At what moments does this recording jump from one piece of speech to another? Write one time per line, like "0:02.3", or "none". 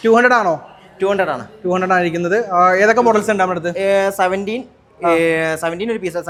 none